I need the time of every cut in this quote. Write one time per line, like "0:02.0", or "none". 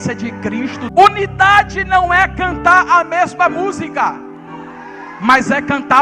0:00.9